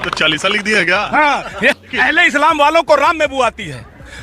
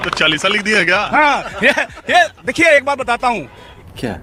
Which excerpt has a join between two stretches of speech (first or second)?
first